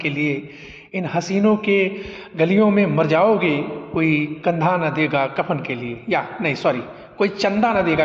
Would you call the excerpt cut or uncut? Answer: uncut